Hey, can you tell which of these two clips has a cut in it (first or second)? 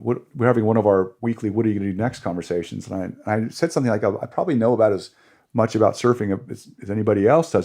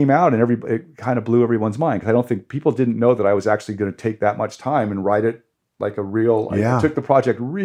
first